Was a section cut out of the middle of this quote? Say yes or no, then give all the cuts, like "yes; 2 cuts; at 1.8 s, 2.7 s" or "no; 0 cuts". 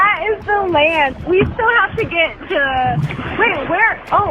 yes; 2 cuts; at 1.2 s, 3.2 s